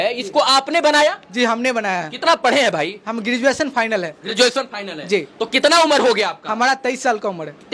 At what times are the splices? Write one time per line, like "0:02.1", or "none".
none